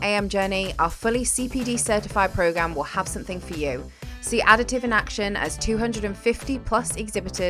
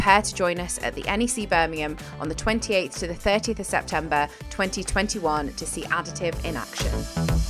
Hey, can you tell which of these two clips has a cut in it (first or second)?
second